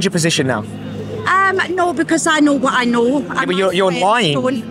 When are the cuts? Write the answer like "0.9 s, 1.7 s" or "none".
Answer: none